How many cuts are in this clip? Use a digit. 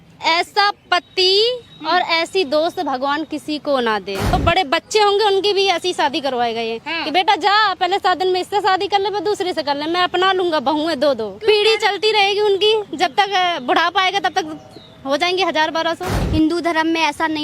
3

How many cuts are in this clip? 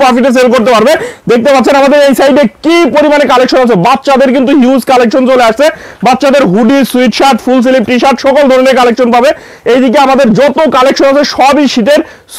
0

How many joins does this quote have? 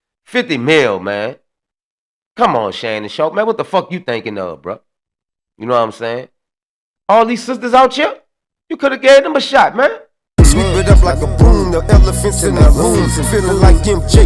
1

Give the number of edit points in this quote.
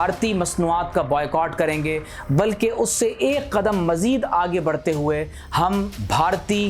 0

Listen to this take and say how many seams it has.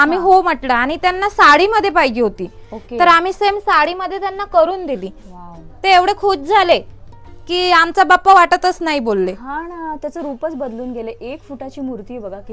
0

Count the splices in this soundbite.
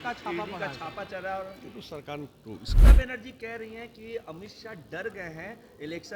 1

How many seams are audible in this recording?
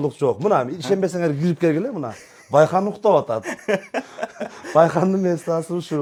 0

